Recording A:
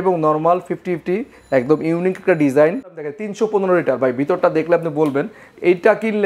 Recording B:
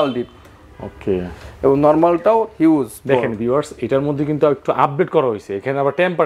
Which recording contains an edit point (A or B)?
A